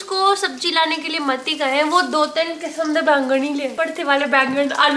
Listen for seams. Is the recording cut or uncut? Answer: cut